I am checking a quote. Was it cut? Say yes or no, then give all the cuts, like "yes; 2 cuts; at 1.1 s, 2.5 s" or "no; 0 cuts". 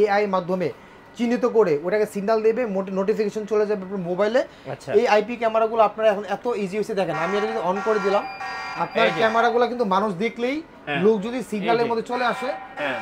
no; 0 cuts